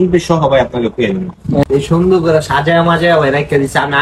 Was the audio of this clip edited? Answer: yes; 1 cut; at 1.6 s

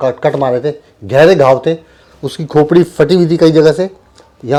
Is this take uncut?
yes; 0 cuts

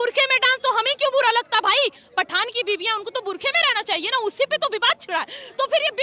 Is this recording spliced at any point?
no; 0 cuts

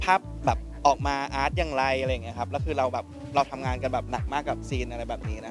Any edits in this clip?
no; 0 cuts

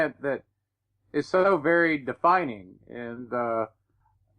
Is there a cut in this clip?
no; 0 cuts

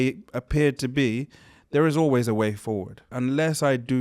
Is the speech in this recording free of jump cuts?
no; 1 cut; at 3.1 s

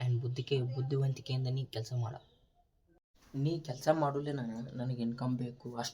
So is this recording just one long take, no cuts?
no; 1 cut; at 3.1 s

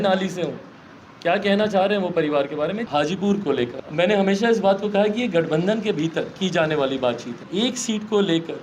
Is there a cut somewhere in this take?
yes; 3 cuts; at 2.8 s, 3.8 s, 7.4 s

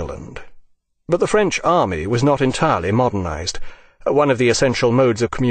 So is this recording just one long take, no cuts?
no; 1 cut; at 4.4 s

